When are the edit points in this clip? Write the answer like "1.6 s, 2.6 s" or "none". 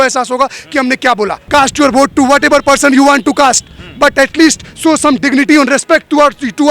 1.4 s